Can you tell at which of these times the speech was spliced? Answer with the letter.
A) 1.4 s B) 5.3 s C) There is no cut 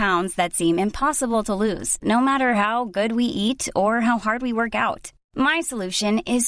C